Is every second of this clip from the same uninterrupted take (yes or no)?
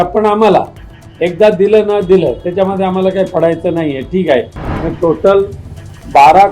no